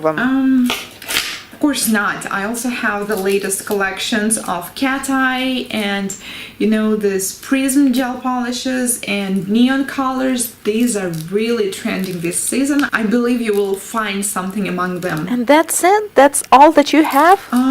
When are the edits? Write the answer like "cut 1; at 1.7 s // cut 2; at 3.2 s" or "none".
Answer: cut 1; at 4.9 s

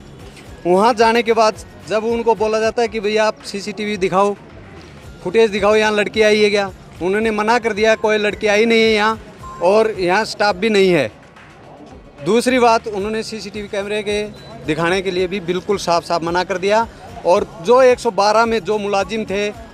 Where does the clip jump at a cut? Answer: none

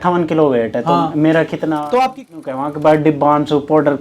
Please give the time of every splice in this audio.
cut 1; at 2.2 s

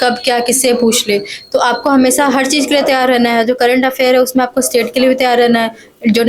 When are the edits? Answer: none

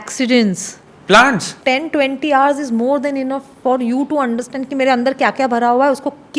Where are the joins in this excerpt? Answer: cut 1; at 1.5 s

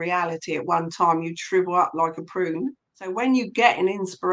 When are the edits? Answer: cut 1; at 3.0 s

